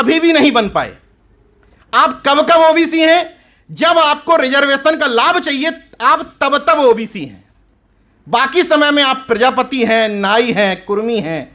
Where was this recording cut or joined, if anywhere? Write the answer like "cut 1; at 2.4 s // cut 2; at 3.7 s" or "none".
none